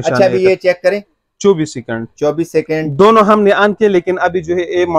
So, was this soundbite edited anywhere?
no; 0 cuts

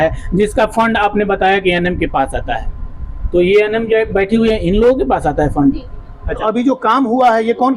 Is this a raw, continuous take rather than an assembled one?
no; 1 cut; at 6.4 s

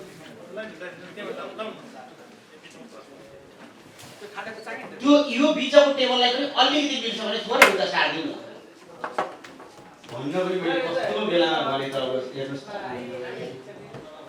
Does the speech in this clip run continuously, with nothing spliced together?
yes; 0 cuts

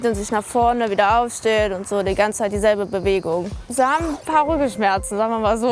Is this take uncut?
yes; 0 cuts

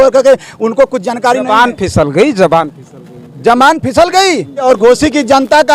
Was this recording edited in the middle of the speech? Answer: yes; 1 cut; at 4.6 s

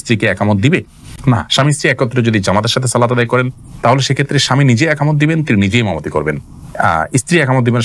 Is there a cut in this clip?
no; 0 cuts

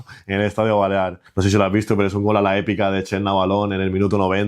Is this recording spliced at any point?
yes; 1 cut; at 1.2 s

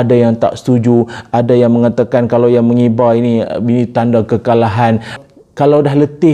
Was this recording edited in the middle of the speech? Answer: yes; 1 cut; at 5.1 s

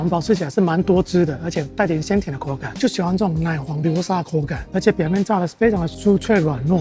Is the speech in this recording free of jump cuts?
no; 1 cut; at 2.7 s

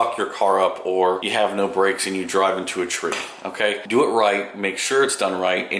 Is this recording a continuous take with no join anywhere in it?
no; 2 cuts; at 1.2 s, 3.8 s

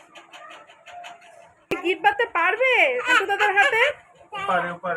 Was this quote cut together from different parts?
yes; 1 cut; at 1.7 s

